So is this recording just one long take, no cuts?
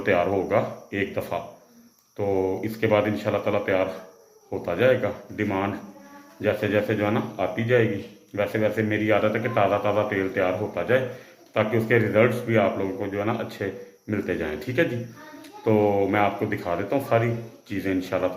yes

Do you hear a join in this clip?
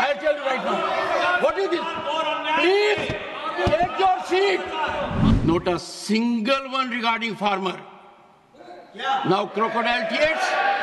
yes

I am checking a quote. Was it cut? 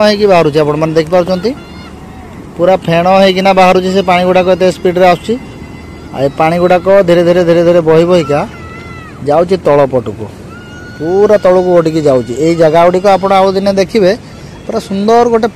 no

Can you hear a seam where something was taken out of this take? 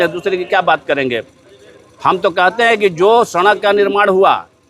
no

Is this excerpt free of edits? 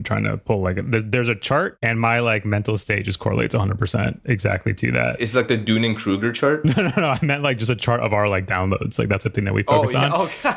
no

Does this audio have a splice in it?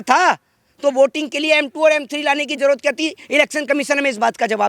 no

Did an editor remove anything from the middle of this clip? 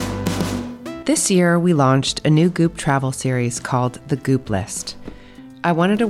yes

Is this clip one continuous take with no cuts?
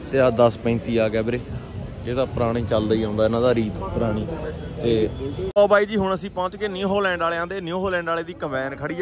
yes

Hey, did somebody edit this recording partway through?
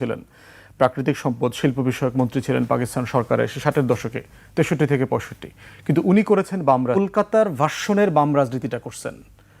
yes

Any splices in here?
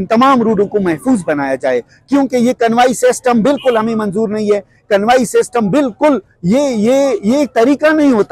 no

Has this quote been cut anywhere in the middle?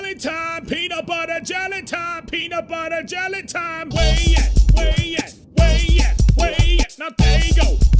no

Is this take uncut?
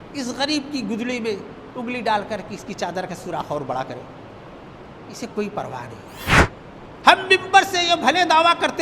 no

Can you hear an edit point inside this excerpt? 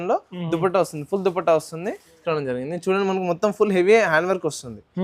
yes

